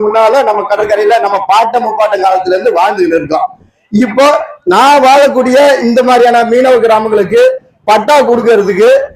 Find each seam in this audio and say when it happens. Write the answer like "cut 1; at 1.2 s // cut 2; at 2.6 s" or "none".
none